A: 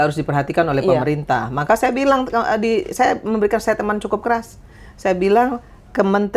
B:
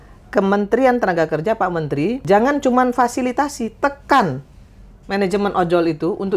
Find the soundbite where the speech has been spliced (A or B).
B